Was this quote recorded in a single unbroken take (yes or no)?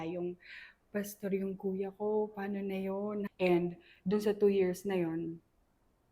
no